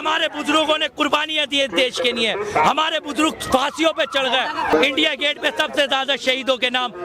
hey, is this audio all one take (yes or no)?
no